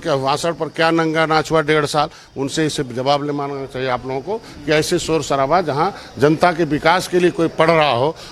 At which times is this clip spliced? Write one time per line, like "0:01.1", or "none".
none